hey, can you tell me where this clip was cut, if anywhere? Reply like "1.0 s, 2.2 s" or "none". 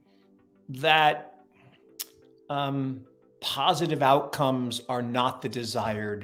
none